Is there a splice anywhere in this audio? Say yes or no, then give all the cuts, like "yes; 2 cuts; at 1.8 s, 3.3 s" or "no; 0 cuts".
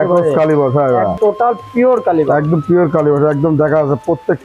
yes; 1 cut; at 1.2 s